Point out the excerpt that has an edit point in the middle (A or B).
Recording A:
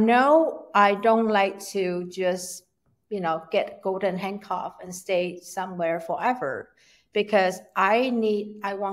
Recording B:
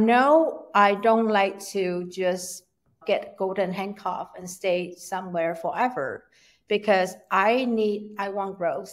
B